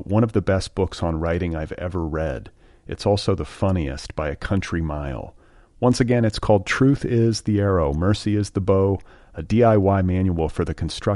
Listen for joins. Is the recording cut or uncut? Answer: uncut